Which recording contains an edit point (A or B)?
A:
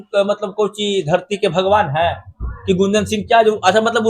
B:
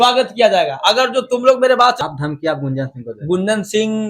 B